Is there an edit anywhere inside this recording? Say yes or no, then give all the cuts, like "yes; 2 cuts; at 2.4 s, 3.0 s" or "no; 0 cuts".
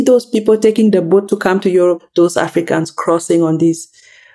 yes; 1 cut; at 2.0 s